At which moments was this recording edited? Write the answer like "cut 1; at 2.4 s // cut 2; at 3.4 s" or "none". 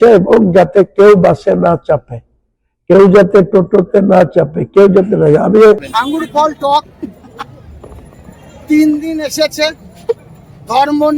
cut 1; at 5.9 s